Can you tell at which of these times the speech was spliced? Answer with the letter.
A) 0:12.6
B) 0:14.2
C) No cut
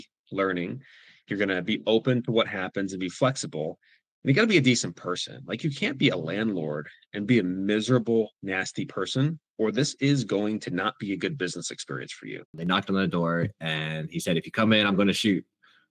A